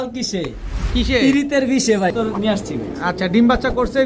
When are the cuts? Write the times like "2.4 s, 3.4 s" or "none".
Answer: 2.1 s